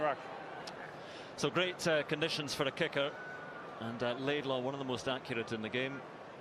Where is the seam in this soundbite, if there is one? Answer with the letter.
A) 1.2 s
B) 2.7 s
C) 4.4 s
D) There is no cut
D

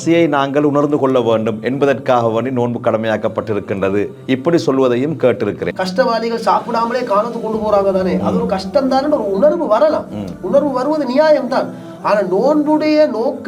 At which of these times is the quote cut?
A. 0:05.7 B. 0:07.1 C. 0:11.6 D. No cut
A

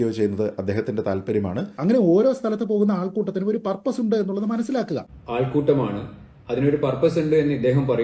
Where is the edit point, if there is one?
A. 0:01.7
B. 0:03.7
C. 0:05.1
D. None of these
A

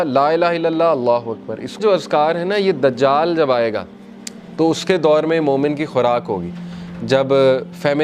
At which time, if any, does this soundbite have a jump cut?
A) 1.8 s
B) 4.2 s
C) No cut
A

